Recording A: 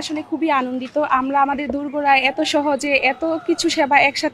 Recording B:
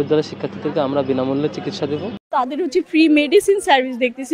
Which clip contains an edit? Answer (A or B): B